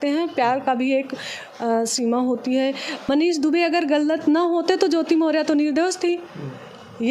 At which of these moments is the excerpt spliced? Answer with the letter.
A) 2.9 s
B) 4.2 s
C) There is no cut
A